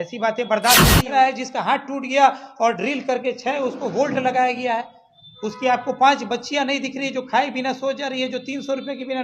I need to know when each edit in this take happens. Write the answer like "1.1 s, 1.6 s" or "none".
1.0 s